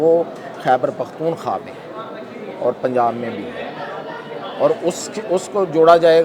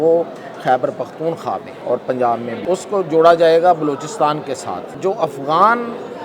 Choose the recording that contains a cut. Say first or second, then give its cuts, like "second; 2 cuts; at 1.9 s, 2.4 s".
second; 3 cuts; at 1.7 s, 2.6 s, 4.8 s